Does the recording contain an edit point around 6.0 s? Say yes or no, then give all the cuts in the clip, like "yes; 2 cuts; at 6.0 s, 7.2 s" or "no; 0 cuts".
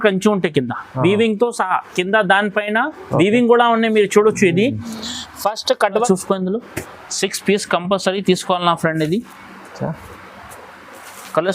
yes; 1 cut; at 6.0 s